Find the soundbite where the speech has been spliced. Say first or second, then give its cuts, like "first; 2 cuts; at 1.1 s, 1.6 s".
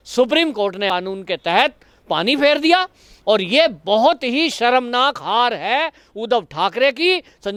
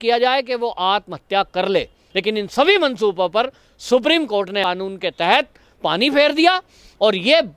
second; 1 cut; at 2.0 s